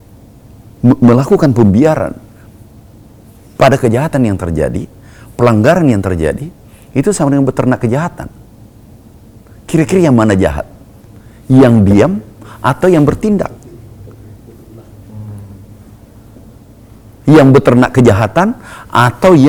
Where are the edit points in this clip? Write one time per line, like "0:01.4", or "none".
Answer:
none